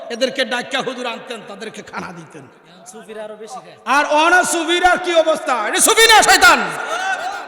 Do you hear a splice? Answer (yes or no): no